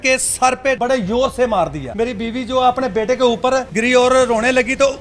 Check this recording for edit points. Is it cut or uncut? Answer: cut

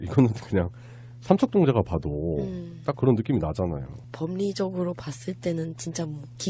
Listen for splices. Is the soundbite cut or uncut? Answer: uncut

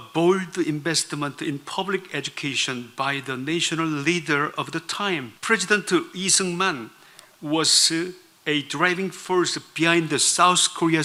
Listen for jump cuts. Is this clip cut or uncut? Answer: uncut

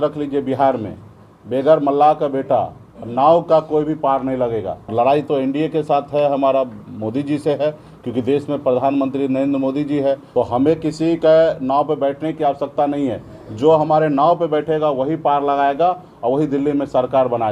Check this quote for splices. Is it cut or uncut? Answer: cut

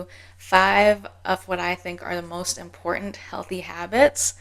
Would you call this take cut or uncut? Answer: uncut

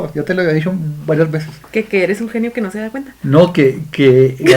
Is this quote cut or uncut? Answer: uncut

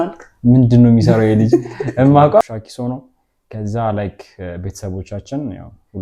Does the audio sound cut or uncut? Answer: cut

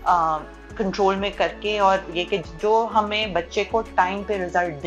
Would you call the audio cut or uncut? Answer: uncut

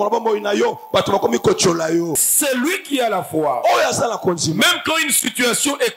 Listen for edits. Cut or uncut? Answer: cut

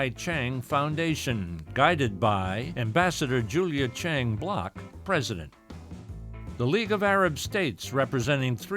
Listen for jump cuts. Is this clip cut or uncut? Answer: uncut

